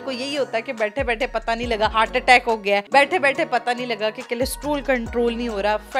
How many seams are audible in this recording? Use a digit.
0